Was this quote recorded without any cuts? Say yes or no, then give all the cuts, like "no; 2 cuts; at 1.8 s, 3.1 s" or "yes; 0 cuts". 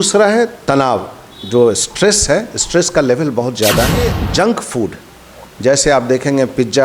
no; 1 cut; at 4.2 s